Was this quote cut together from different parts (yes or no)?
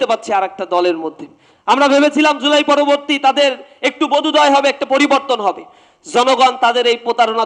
no